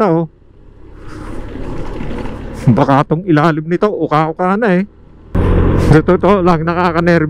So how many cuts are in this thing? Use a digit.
1